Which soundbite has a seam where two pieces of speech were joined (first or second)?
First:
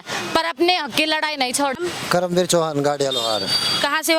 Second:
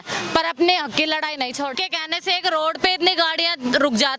second